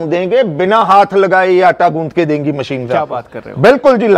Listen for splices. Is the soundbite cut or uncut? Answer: uncut